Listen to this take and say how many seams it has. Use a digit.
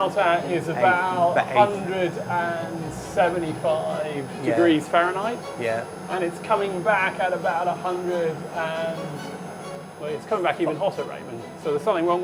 0